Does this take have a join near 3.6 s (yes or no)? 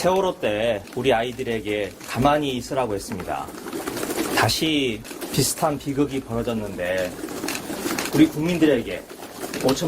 yes